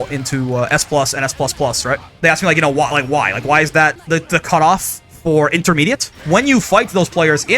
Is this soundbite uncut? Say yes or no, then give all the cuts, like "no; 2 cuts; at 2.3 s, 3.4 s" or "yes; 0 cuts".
no; 3 cuts; at 2.1 s, 4.0 s, 6.1 s